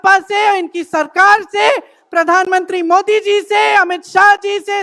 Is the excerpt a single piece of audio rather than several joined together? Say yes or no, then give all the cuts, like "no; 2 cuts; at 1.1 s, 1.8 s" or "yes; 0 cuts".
yes; 0 cuts